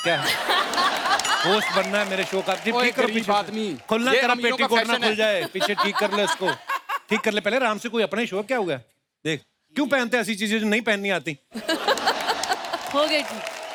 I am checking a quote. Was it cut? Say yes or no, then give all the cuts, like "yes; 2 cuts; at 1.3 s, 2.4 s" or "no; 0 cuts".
no; 0 cuts